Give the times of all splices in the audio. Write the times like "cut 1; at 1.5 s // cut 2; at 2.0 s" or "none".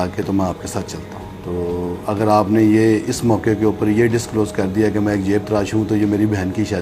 cut 1; at 1.3 s